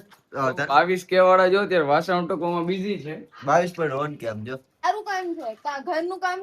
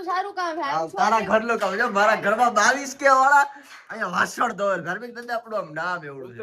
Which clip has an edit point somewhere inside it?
first; 1 cut; at 4.8 s

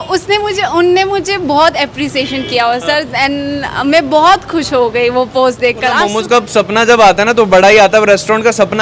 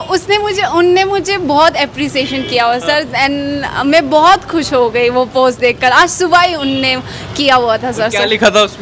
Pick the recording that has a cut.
first; 1 cut; at 6.0 s

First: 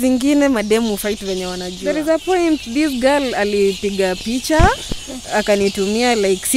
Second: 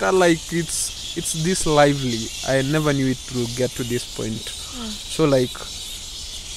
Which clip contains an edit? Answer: first; 1 cut; at 1.8 s

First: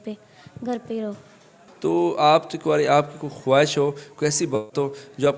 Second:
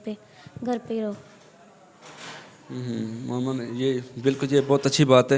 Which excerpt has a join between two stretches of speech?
first; 1 cut; at 1.6 s

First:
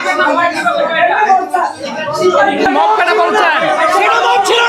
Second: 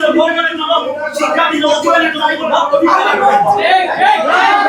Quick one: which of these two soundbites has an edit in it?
first; 1 cut; at 2.7 s

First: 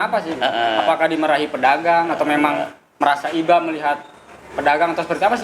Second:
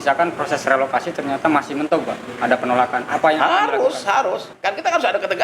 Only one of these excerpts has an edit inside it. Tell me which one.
second; 1 cut; at 4.5 s

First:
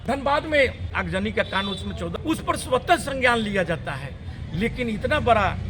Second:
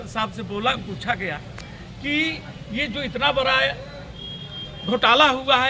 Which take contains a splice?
first; 2 cuts; at 0.9 s, 2.1 s

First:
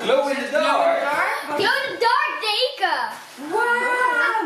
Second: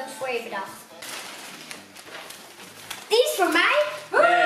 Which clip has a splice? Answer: second; 1 cut; at 1.1 s

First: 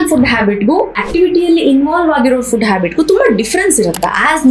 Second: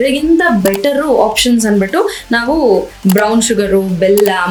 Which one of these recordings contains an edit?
first; 1 cut; at 1.0 s

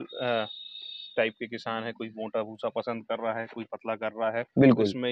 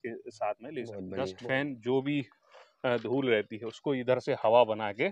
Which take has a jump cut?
second; 1 cut; at 1.0 s

